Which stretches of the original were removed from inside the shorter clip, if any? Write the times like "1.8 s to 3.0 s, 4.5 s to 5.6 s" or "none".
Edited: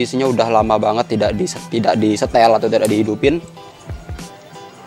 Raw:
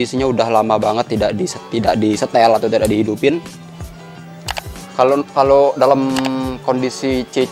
none